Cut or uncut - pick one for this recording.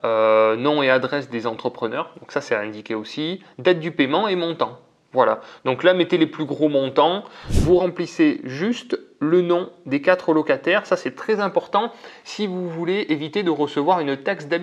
cut